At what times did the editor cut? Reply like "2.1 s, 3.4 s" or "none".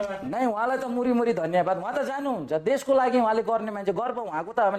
none